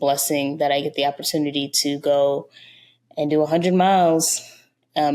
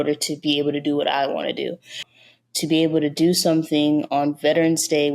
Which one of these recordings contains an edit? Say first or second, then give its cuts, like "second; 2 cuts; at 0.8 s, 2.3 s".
second; 1 cut; at 2.1 s